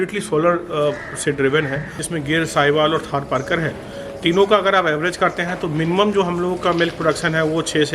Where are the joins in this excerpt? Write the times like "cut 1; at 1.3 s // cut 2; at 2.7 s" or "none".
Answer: cut 1; at 2.0 s